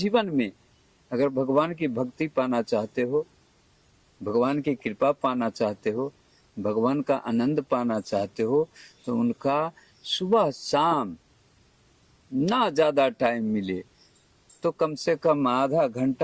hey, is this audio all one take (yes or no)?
yes